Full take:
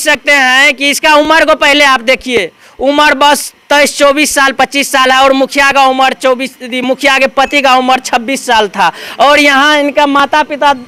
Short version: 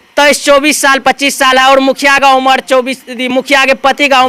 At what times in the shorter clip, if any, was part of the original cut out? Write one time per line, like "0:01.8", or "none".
none